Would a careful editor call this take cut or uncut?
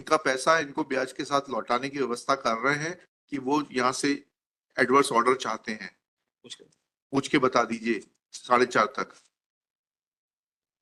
uncut